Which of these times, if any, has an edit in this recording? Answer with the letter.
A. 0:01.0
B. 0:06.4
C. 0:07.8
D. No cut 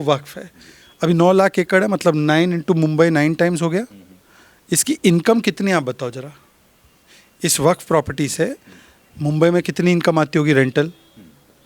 D